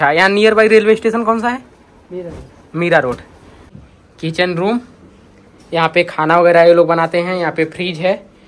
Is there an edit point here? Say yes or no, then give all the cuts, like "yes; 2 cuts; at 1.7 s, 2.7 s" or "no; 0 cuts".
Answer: yes; 1 cut; at 3.8 s